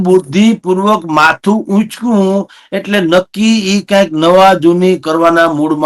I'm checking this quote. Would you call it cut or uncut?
uncut